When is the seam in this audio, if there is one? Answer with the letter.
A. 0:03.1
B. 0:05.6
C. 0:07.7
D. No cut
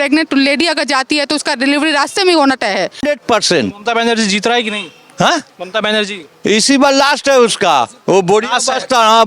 A